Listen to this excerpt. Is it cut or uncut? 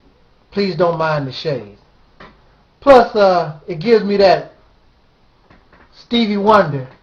cut